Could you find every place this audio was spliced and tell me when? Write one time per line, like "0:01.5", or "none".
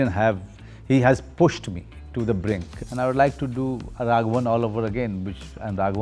0:02.8